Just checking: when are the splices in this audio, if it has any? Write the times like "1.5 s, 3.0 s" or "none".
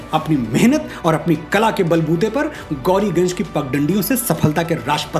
none